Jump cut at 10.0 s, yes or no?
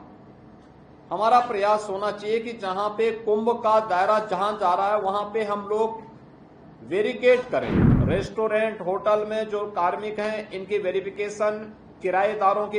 no